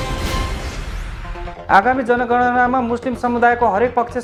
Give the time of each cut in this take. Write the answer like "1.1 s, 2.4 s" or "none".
none